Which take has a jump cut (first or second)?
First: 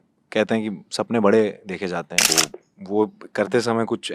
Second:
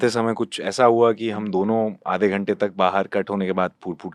first